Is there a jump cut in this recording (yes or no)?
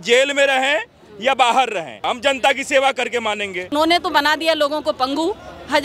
yes